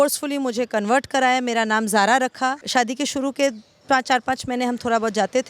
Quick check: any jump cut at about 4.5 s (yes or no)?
no